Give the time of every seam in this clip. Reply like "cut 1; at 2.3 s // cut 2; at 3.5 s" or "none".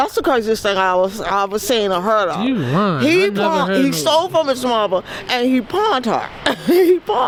none